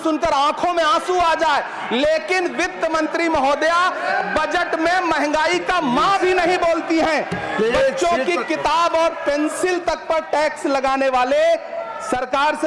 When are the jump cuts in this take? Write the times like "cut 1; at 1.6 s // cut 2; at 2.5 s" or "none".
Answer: none